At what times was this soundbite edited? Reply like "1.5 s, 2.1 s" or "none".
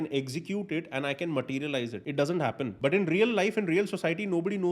2.0 s, 2.7 s